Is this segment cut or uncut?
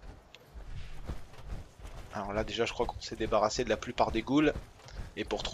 uncut